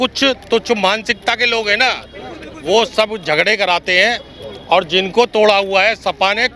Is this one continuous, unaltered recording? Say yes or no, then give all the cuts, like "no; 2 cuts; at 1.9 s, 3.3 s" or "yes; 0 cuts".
yes; 0 cuts